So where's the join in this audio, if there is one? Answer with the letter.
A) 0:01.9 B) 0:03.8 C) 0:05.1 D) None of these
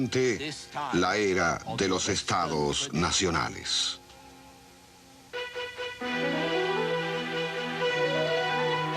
A